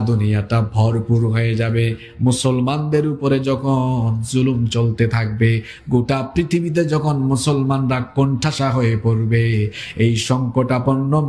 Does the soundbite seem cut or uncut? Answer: uncut